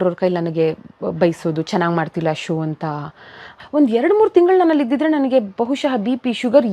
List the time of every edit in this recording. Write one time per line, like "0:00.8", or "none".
0:03.5